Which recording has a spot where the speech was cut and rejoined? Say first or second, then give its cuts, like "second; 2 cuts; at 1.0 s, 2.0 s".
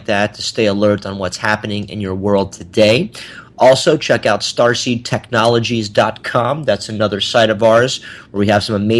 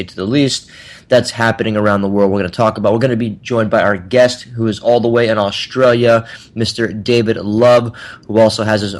second; 1 cut; at 2.0 s